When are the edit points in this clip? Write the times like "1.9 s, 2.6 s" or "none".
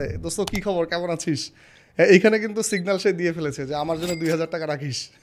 none

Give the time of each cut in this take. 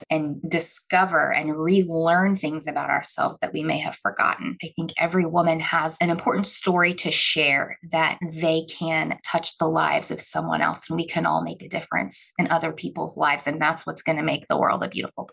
4.6 s

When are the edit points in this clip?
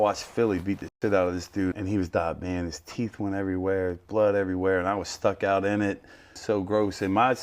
1.7 s, 6.3 s

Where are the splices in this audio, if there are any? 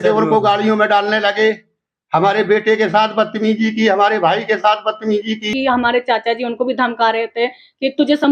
5.5 s

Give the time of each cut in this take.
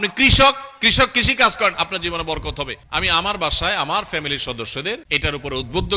2.8 s, 5.0 s

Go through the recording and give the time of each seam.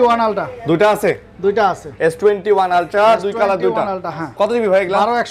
none

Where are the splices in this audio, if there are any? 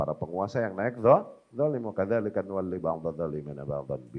none

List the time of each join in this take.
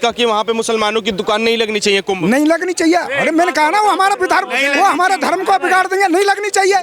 none

